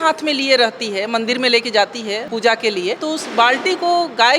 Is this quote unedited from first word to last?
no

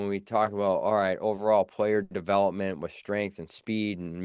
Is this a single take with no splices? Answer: yes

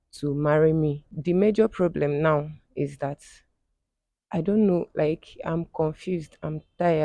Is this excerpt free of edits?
no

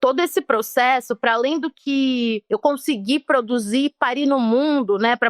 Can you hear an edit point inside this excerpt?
no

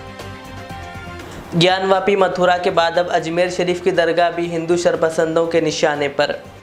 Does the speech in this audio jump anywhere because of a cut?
no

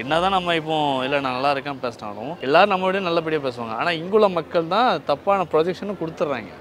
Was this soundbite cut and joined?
yes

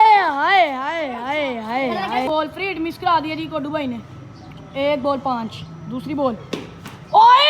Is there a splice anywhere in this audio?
yes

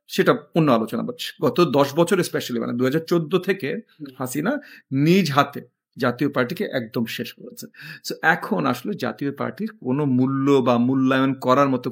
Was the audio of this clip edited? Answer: no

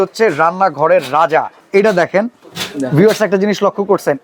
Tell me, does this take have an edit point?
no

